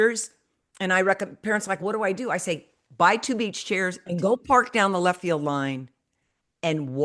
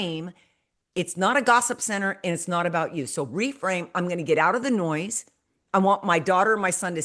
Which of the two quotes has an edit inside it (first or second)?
first